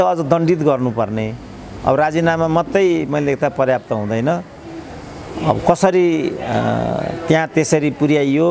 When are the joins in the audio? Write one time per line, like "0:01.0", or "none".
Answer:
none